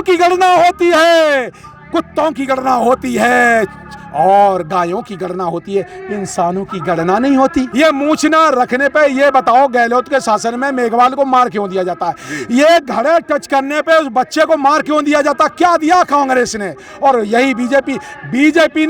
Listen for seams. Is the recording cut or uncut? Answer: cut